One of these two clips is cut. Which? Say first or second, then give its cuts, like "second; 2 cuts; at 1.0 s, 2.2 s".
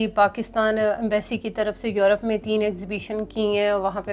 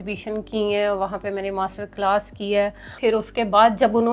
second; 1 cut; at 2.9 s